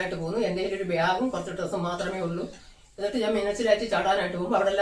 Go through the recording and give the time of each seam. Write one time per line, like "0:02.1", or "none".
none